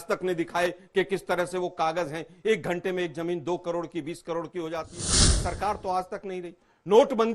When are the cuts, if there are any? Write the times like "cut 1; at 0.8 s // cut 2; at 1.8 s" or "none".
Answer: cut 1; at 5.3 s